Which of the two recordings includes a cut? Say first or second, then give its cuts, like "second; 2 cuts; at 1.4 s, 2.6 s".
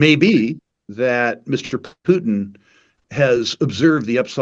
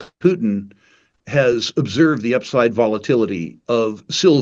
second; 1 cut; at 3.5 s